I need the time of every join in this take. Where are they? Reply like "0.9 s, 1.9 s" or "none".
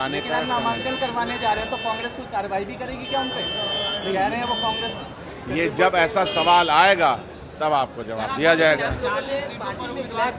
none